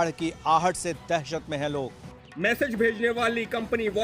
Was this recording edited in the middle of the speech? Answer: yes; 1 cut; at 1.9 s

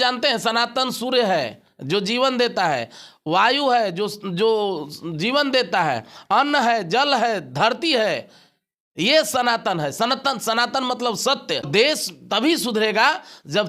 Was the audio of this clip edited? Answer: yes; 1 cut; at 11.7 s

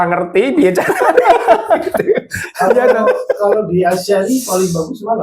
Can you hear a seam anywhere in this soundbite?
no; 0 cuts

